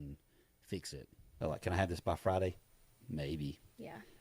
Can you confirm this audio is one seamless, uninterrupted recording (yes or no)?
no